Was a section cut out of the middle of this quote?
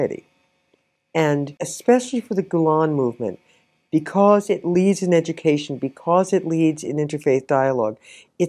yes; 1 cut; at 1.5 s

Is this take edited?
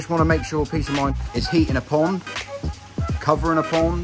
yes; 1 cut; at 1.1 s

